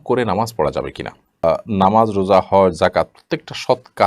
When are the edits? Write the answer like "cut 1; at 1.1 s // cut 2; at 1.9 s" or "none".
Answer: cut 1; at 1.4 s